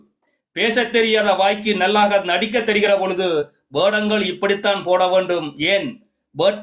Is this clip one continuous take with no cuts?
yes; 0 cuts

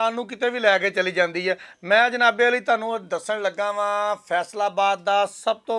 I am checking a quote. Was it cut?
no; 0 cuts

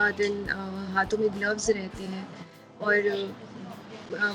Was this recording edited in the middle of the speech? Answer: no; 0 cuts

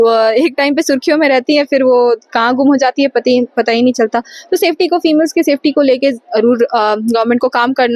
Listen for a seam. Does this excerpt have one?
no; 0 cuts

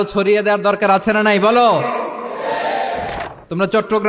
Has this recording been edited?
yes; 1 cut; at 3.1 s

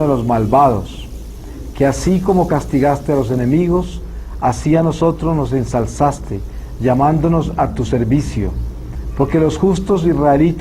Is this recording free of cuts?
no; 1 cut; at 3.6 s

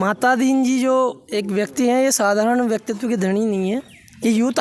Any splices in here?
no; 0 cuts

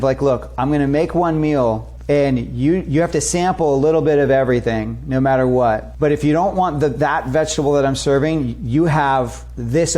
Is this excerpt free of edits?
no; 2 cuts; at 1.9 s, 5.9 s

